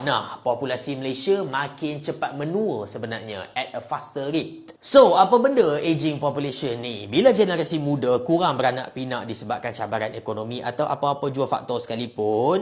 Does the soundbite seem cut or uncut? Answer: uncut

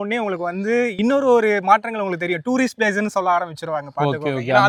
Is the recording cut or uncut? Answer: uncut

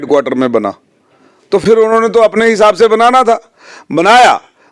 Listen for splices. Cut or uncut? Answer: uncut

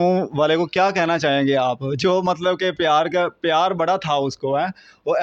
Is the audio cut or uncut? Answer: uncut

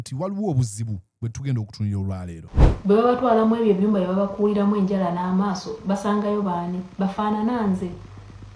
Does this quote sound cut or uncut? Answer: cut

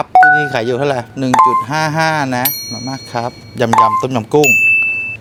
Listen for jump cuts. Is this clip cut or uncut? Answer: uncut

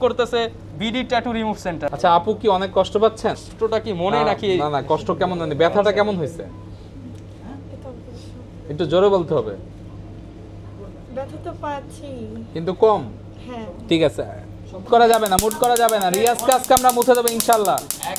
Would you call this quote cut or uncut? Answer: uncut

